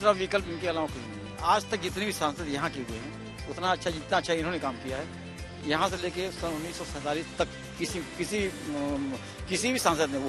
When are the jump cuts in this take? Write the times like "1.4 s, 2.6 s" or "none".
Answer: none